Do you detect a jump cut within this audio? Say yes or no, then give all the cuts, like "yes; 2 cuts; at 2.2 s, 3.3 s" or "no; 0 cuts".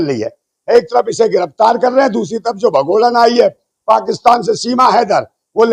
no; 0 cuts